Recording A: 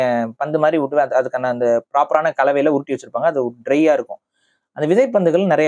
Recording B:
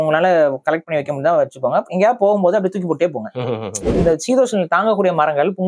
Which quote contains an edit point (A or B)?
B